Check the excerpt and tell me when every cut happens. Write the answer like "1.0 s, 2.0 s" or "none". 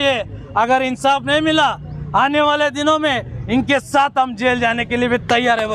none